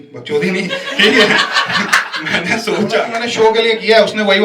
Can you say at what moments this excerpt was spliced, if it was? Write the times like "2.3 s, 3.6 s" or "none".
3.2 s